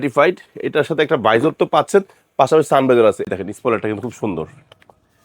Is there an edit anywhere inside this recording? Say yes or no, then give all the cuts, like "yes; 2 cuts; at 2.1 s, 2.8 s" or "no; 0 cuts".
yes; 1 cut; at 3.3 s